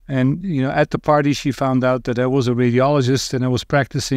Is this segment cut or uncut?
uncut